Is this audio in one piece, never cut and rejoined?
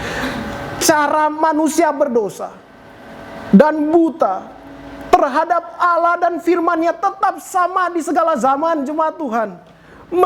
yes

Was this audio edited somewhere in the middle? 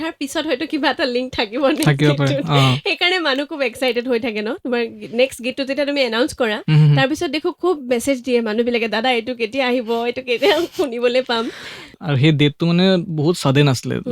yes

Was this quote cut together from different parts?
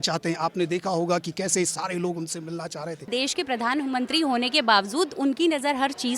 yes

